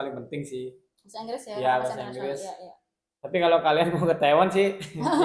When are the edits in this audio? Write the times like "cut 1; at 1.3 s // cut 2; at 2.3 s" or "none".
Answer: none